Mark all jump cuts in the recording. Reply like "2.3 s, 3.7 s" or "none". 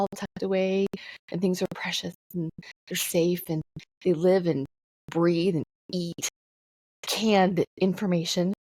none